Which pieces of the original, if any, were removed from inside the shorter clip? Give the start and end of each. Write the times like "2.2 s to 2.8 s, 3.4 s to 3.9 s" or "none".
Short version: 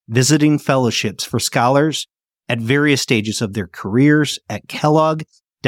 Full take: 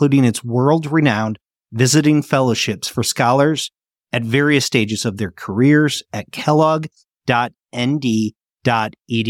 none

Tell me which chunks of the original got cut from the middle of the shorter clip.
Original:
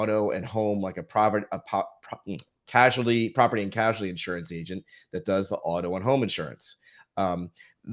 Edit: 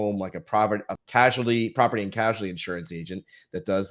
1.6 s to 2.5 s

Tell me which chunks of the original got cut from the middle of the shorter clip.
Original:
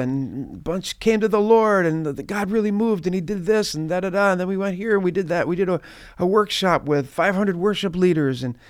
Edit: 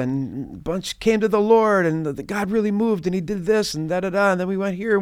none

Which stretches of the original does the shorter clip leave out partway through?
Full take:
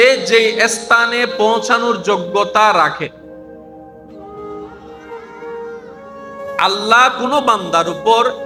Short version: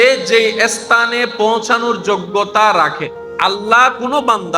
3.2 s to 6.4 s

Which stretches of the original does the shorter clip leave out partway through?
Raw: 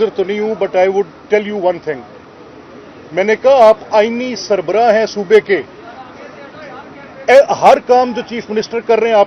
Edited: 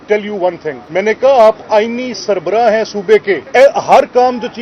2.0 s to 3.0 s, 5.7 s to 7.2 s

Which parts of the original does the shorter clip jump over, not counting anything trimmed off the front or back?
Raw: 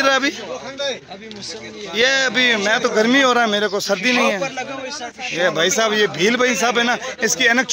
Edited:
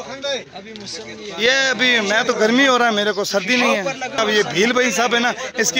4.7 s to 5.8 s

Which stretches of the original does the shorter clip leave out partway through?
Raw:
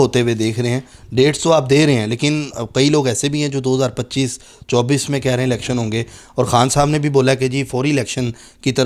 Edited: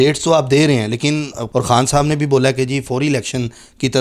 2.6 s to 6.2 s

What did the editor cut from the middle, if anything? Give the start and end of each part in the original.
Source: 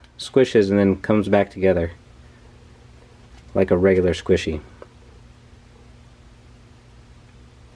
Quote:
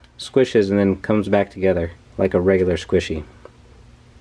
2.0 s to 3.4 s

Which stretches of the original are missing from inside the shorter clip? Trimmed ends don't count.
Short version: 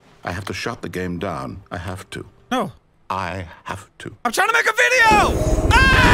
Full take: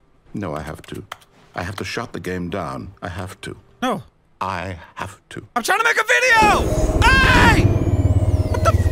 none

